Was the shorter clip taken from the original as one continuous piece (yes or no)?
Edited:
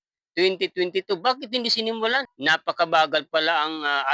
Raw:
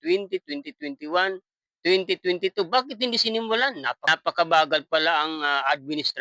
no